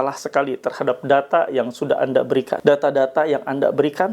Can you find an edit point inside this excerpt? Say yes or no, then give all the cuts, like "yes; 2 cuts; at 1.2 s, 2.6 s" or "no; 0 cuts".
yes; 1 cut; at 2.5 s